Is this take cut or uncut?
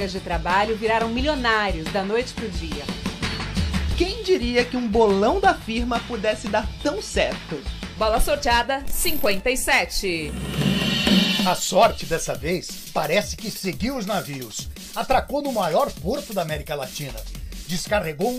uncut